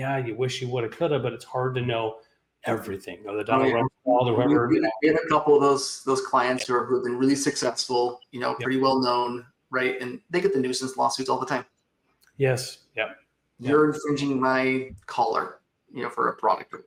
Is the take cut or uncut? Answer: uncut